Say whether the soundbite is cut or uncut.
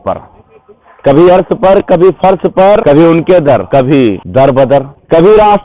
cut